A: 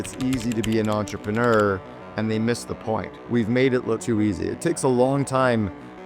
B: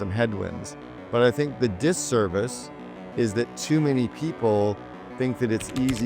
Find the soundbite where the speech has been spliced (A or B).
A